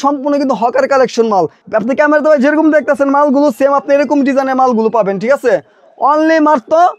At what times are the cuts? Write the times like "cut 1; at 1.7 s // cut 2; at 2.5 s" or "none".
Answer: cut 1; at 1.6 s